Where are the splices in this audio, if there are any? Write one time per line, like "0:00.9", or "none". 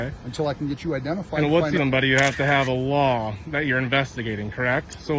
0:01.8